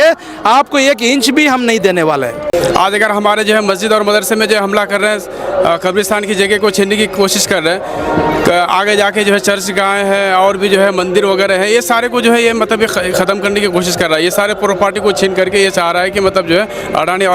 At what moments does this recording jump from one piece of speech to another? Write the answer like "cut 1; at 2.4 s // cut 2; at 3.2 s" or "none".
cut 1; at 2.5 s